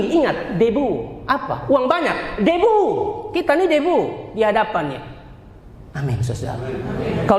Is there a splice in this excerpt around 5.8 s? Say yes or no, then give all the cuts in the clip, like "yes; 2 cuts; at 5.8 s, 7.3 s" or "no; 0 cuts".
no; 0 cuts